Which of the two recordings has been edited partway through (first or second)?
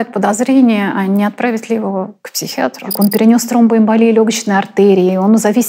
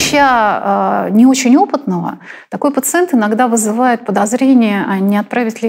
first